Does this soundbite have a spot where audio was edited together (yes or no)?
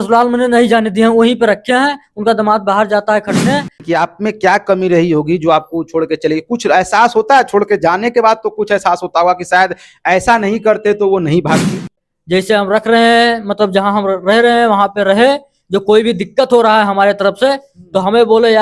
yes